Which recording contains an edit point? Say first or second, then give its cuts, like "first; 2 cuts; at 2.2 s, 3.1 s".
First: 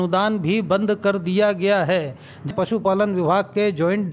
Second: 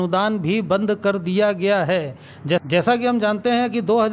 first; 1 cut; at 2.5 s